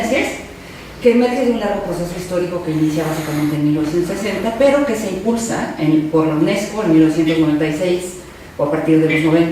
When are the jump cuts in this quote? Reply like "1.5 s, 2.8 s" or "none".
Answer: 6.7 s